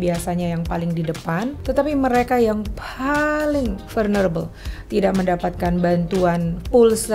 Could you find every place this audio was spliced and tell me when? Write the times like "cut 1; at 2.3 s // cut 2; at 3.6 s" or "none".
cut 1; at 1.6 s